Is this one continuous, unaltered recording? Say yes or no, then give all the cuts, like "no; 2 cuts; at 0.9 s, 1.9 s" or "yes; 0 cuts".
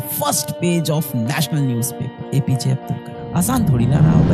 yes; 0 cuts